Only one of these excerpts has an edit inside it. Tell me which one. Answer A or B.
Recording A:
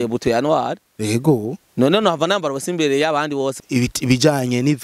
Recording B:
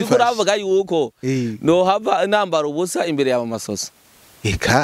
A